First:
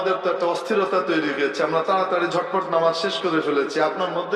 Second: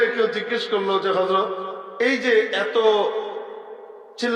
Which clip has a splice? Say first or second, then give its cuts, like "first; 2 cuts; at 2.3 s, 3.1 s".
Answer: second; 1 cut; at 1.8 s